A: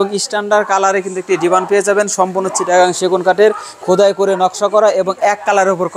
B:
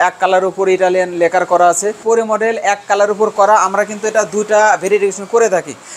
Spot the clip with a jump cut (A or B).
B